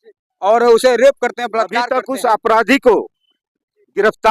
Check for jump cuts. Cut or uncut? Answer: cut